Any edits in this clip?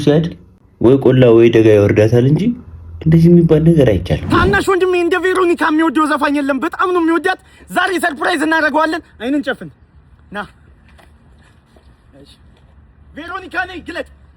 yes; 1 cut; at 4.2 s

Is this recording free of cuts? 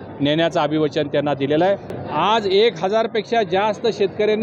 no; 1 cut; at 1.9 s

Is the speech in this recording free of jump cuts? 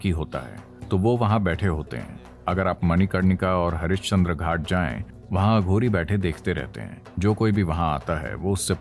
yes; 0 cuts

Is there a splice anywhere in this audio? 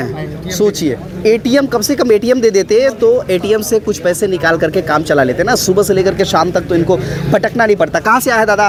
no; 0 cuts

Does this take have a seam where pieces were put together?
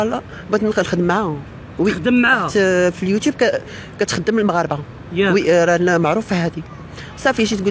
no; 0 cuts

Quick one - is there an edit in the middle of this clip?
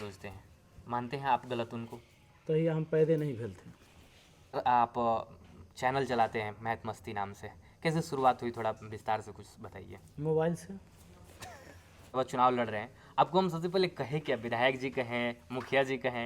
yes; 2 cuts; at 4.6 s, 12.1 s

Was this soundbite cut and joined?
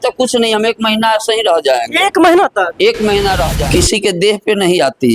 yes; 1 cut; at 3.5 s

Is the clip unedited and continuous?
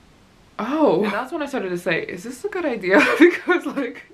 no; 1 cut; at 1.4 s

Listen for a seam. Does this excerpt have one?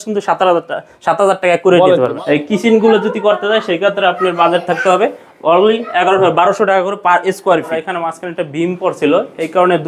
yes; 2 cuts; at 2.2 s, 7.8 s

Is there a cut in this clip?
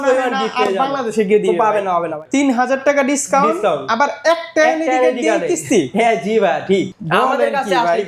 yes; 2 cuts; at 2.2 s, 7.0 s

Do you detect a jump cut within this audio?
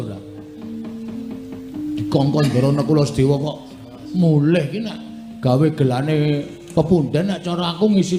no; 0 cuts

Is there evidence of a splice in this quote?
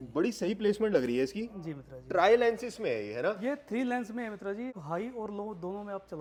no; 0 cuts

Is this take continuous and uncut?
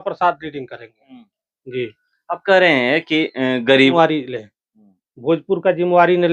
no; 1 cut; at 3.9 s

